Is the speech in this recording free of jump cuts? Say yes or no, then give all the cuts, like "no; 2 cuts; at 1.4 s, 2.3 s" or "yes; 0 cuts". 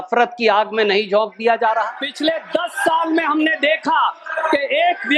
no; 1 cut; at 2.0 s